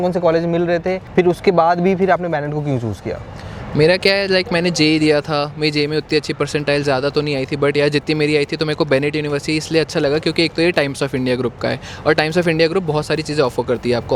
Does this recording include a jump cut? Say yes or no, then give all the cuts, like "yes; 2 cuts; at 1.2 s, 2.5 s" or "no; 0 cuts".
no; 0 cuts